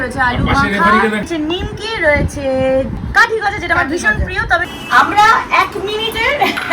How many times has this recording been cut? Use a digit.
3